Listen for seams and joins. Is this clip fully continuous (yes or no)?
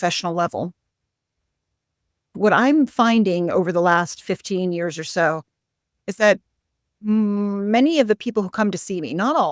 no